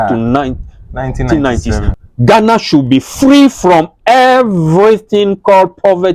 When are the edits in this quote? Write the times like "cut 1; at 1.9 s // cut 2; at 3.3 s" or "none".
cut 1; at 1.9 s